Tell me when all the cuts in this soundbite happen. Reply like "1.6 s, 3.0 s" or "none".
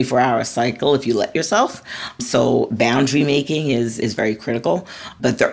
none